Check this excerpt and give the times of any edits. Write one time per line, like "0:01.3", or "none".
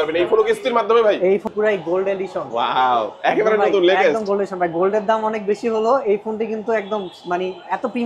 0:01.5

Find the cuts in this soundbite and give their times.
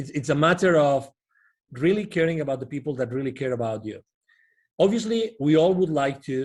none

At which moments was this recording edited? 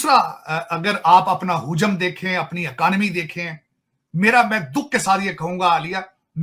none

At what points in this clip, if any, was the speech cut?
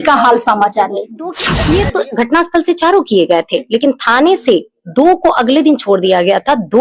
0:01.5

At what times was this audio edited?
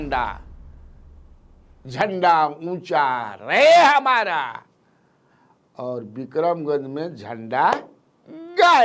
none

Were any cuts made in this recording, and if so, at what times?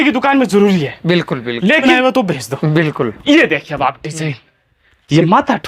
0:01.8

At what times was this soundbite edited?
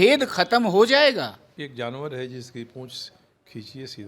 0:01.5

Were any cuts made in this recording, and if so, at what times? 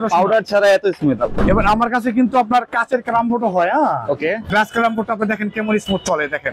0:01.4
0:04.5

